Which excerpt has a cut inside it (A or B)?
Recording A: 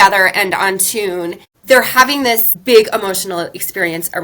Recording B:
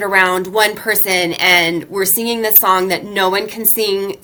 A